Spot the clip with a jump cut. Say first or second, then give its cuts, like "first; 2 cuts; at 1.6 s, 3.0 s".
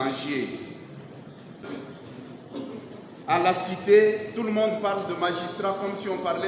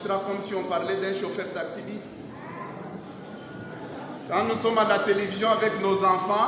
first; 1 cut; at 1.6 s